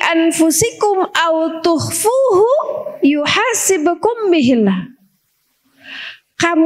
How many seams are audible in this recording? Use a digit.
0